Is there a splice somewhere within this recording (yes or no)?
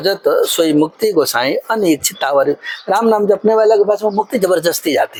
no